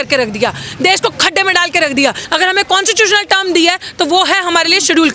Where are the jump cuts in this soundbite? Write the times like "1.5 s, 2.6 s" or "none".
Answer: 2.2 s

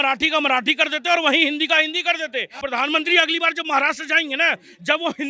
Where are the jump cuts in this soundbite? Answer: 2.5 s

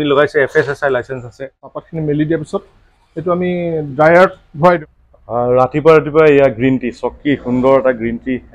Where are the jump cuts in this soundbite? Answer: 1.7 s, 4.8 s

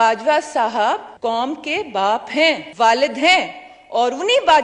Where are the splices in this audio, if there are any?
1.1 s, 2.7 s

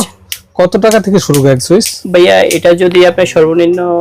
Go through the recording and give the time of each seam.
none

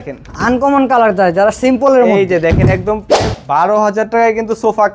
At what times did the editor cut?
3.2 s

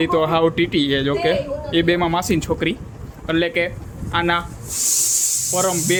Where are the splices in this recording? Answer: none

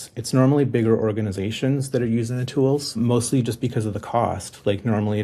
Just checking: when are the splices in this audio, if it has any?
3.0 s

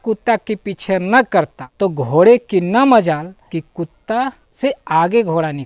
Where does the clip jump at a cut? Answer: 1.6 s, 3.4 s, 4.4 s

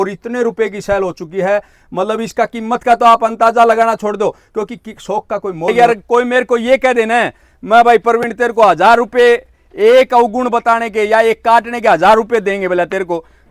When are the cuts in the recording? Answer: 5.7 s

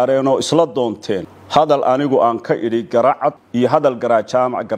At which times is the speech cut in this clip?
1.3 s, 3.4 s

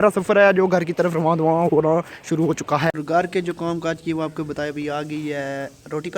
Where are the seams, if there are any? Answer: 3.0 s

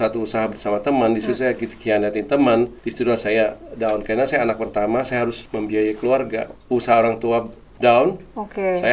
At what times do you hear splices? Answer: 2.8 s, 5.4 s, 6.5 s

